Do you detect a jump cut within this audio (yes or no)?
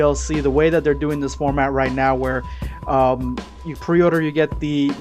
no